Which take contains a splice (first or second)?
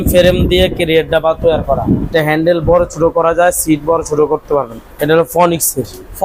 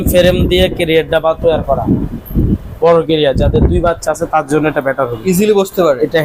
first